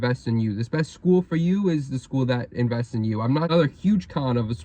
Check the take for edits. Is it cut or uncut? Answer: cut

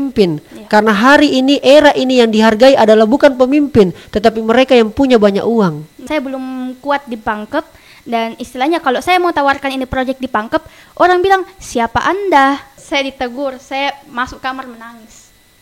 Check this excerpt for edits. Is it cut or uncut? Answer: cut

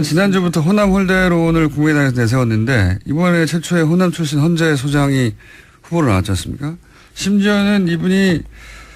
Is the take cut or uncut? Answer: cut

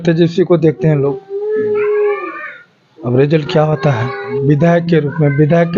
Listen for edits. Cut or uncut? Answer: cut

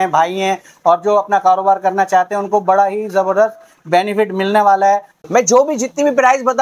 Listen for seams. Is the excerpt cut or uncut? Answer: cut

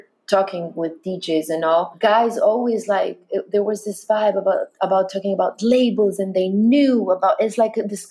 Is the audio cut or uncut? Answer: cut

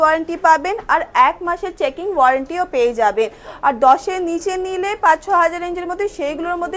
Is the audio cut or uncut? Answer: uncut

